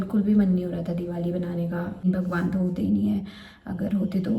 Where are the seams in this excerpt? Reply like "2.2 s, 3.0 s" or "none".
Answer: 2.0 s